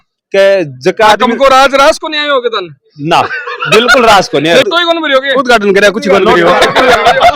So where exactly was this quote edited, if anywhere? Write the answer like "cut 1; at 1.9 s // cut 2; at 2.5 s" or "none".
cut 1; at 4.7 s